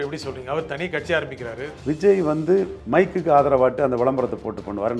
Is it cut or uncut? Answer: uncut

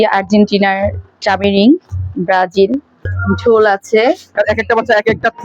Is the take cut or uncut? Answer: cut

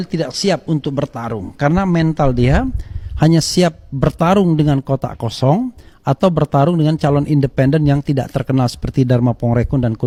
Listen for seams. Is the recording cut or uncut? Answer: uncut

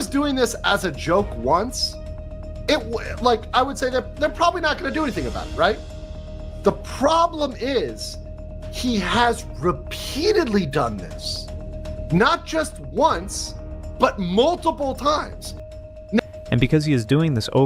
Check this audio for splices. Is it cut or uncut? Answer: uncut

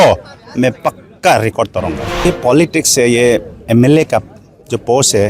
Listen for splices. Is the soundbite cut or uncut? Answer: cut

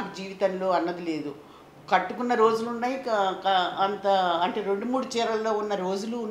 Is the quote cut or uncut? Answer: uncut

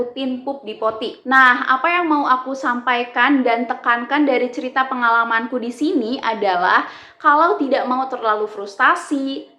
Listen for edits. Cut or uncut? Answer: cut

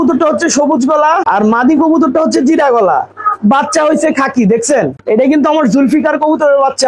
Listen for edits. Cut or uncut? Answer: uncut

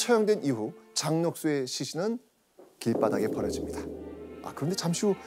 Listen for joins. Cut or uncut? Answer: uncut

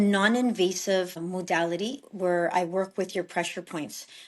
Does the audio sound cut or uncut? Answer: cut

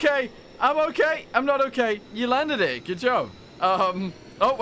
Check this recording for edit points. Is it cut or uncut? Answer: cut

